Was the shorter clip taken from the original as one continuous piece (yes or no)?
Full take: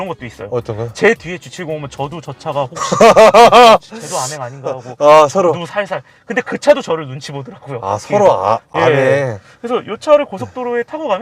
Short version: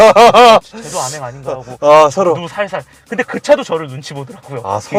yes